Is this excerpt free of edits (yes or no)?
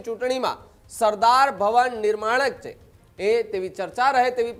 yes